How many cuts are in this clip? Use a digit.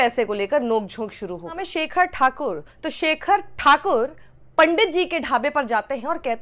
1